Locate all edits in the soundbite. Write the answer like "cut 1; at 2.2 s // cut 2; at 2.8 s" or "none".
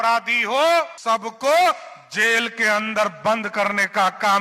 cut 1; at 1.0 s